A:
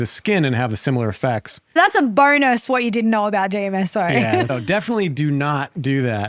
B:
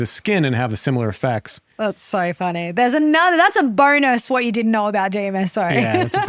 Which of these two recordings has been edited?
A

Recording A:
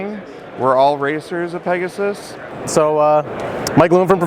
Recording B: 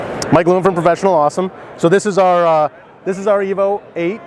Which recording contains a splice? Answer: A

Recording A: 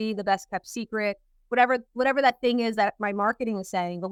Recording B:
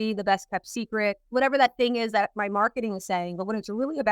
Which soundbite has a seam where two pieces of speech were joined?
B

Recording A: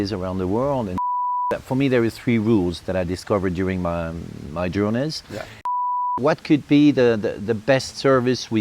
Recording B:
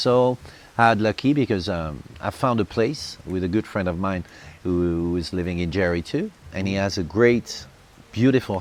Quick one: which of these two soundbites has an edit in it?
A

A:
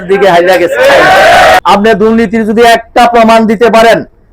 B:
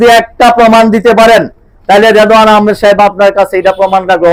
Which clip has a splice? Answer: A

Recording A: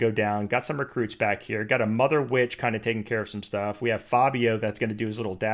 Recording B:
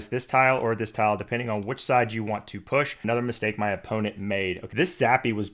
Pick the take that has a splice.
B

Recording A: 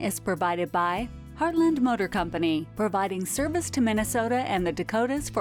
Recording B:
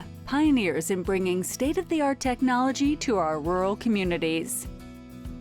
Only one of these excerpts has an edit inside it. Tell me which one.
B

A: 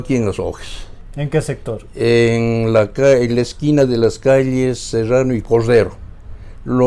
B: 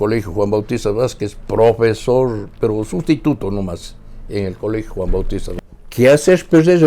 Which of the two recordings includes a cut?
B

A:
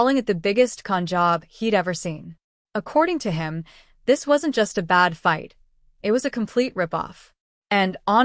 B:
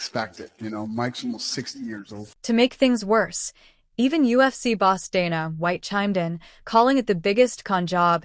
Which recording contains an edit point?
B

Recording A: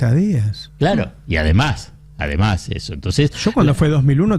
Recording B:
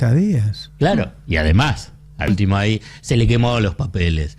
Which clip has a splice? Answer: B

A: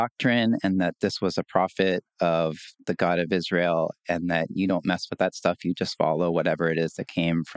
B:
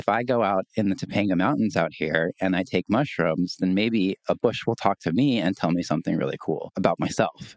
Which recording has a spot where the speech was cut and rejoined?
B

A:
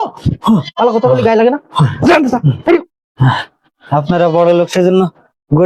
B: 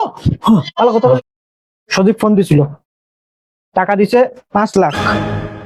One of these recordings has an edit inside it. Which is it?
B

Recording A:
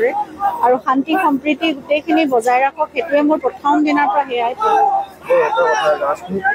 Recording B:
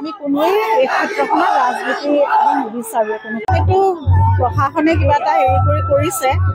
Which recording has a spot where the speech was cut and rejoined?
B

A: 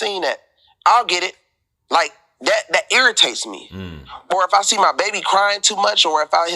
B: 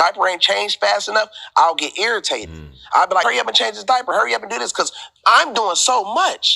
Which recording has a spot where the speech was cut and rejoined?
B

